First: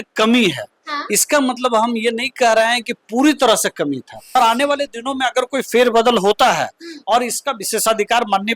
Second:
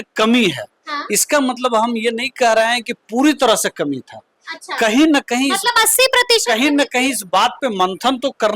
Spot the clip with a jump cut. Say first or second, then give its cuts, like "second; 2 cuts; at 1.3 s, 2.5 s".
first; 1 cut; at 4.3 s